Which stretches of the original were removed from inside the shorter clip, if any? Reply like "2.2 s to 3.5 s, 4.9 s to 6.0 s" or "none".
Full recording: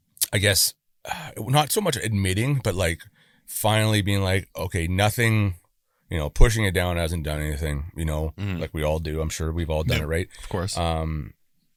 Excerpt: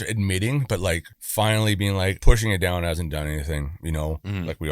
3.1 s to 3.4 s, 4.5 s to 6.3 s